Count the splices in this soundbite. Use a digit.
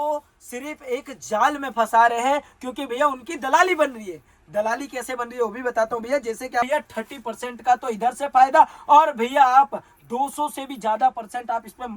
1